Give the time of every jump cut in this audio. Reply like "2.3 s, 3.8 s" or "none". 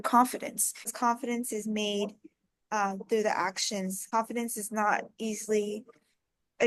0.9 s, 4.1 s